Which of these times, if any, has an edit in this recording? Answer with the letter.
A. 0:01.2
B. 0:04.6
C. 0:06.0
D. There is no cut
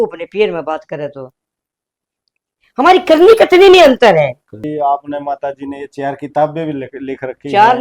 B